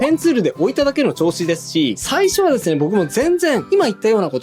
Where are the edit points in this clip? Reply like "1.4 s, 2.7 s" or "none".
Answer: 2.0 s